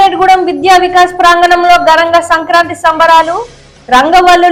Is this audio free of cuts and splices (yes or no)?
yes